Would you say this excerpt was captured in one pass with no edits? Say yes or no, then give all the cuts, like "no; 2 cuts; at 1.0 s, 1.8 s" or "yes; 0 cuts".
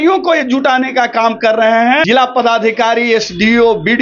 no; 1 cut; at 2.0 s